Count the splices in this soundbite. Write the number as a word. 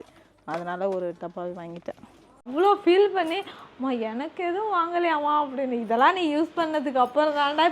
one